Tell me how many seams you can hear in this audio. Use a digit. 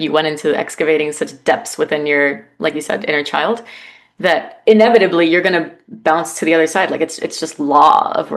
0